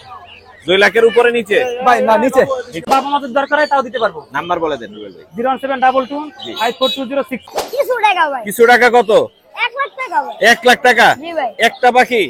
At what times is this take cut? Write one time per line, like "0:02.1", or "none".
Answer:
0:02.9
0:07.6